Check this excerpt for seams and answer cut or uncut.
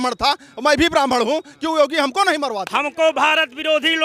cut